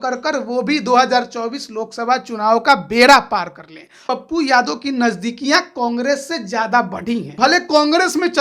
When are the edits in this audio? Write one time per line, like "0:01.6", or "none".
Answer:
0:04.0
0:07.3